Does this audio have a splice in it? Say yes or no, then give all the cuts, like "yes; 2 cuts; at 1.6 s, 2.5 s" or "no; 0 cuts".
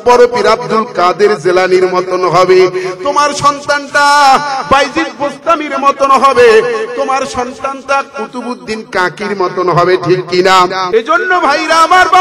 yes; 1 cut; at 10.8 s